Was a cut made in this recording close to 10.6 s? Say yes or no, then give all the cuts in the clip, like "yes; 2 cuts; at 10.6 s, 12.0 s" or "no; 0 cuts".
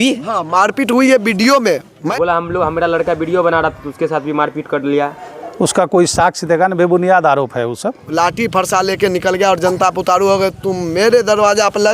no; 2 cuts; at 2.0 s, 8.0 s